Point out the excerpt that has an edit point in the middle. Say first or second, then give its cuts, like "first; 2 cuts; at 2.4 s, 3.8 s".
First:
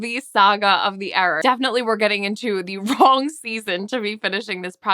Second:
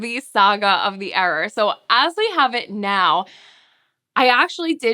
first; 1 cut; at 1.4 s